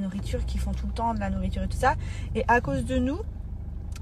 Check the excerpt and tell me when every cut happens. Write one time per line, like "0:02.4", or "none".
none